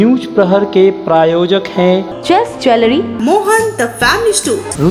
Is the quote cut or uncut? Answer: uncut